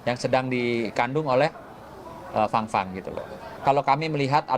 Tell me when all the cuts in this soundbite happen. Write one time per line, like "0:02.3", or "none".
0:03.4